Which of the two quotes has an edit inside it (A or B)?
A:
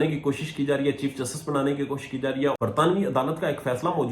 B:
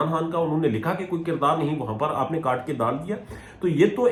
A